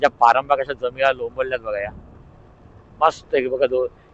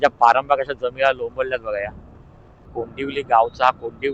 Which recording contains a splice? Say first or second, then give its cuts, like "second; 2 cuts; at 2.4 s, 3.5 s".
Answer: second; 1 cut; at 2.7 s